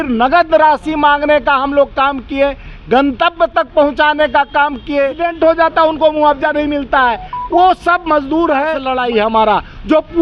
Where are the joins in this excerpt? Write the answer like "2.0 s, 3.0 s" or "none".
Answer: 5.2 s, 8.8 s